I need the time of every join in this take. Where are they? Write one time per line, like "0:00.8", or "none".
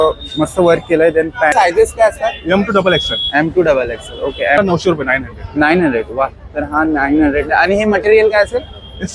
0:01.5
0:04.6